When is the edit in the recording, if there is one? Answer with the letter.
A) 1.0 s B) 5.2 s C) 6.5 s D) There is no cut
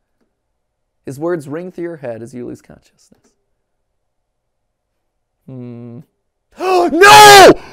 D